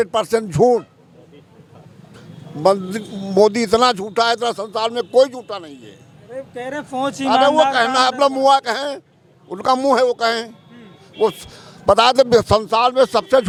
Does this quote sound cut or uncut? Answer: uncut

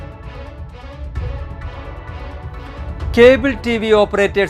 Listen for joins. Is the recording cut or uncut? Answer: uncut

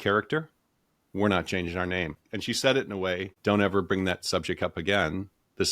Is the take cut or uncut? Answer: cut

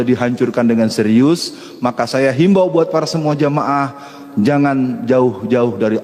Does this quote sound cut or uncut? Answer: uncut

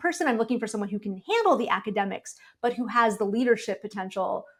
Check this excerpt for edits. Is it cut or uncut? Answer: uncut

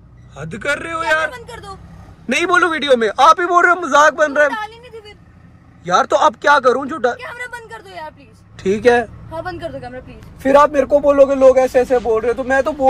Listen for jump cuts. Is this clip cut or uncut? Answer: uncut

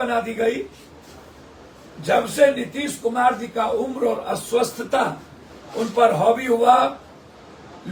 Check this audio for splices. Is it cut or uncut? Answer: uncut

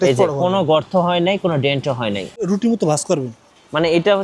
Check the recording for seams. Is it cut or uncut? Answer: cut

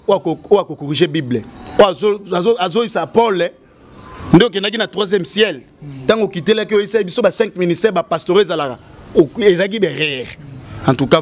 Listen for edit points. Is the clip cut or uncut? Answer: uncut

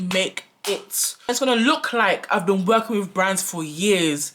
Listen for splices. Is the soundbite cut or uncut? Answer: cut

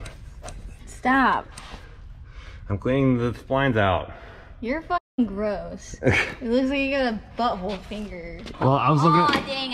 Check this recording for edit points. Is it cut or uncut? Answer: cut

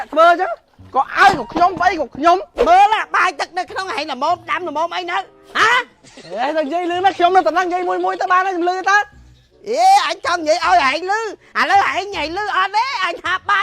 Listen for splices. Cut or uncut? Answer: cut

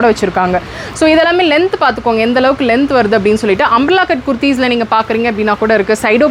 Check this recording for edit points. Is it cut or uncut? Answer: uncut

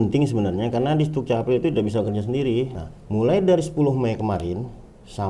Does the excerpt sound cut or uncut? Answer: cut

